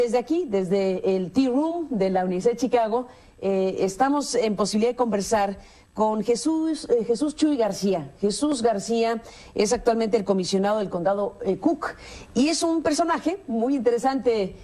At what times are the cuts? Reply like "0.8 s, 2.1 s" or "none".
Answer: none